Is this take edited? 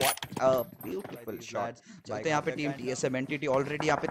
yes; 1 cut; at 2.1 s

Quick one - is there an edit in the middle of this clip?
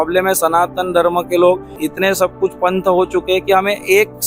yes; 1 cut; at 1.8 s

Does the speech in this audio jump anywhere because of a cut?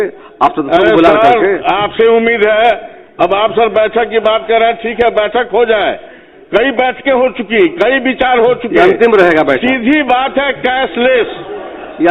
no; 0 cuts

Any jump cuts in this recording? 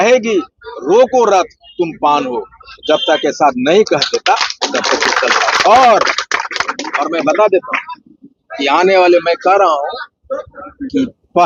no; 0 cuts

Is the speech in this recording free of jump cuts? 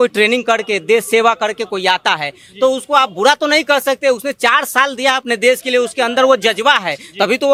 yes; 0 cuts

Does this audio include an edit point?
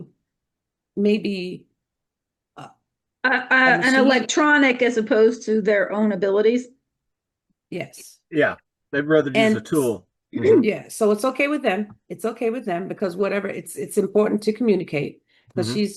no; 0 cuts

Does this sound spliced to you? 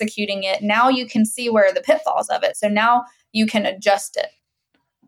no; 0 cuts

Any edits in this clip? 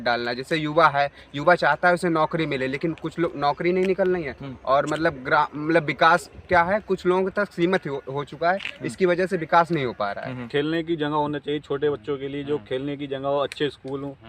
yes; 1 cut; at 10.5 s

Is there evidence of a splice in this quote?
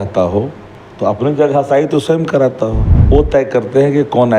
yes; 1 cut; at 2.9 s

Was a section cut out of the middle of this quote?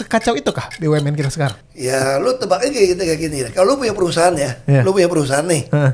yes; 1 cut; at 1.6 s

